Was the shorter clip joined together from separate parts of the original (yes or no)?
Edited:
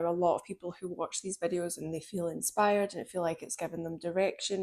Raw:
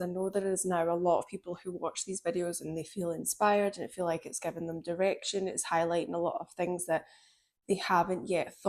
no